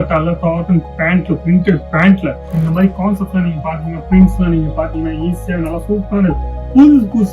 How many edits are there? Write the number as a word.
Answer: one